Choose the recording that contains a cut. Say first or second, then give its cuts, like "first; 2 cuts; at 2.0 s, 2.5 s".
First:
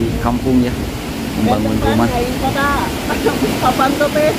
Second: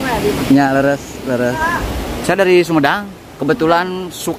second; 1 cut; at 1.6 s